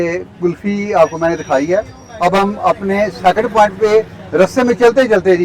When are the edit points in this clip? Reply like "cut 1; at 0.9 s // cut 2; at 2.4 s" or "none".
none